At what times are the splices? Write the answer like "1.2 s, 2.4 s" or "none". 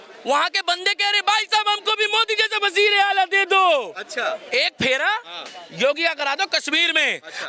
4.4 s